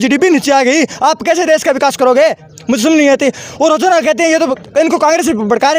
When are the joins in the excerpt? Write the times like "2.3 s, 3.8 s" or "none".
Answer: none